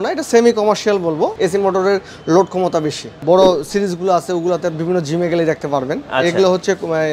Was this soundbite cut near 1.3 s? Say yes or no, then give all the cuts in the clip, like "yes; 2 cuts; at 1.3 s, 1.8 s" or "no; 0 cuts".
yes; 2 cuts; at 1.3 s, 3.2 s